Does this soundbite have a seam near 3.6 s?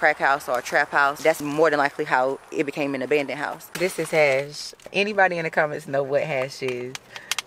yes; 3 cuts; at 1.4 s, 3.6 s, 4.9 s

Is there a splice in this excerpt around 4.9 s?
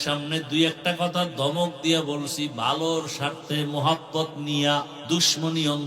yes; 1 cut; at 4.9 s

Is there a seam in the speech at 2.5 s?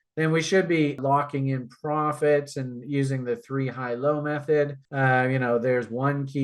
no; 2 cuts; at 1.0 s, 4.8 s

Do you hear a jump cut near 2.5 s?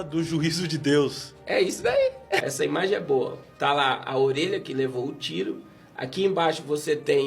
yes; 1 cut; at 2.5 s

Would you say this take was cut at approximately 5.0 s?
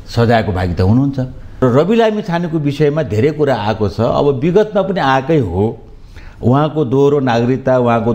no; 1 cut; at 1.6 s

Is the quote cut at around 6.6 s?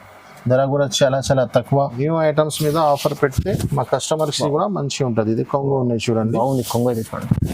no; 1 cut; at 2.0 s

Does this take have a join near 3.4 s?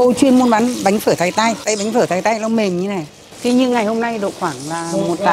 yes; 2 cuts; at 1.6 s, 3.4 s

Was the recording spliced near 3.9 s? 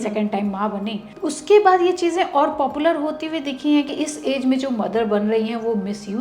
yes; 2 cuts; at 1.1 s, 3.9 s

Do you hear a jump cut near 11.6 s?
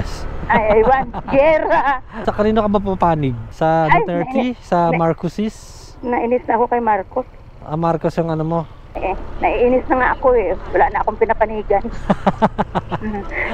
no; 2 cuts; at 2.2 s, 8.8 s

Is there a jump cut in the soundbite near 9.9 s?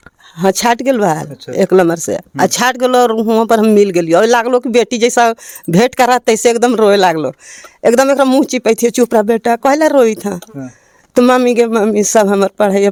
no; 0 cuts

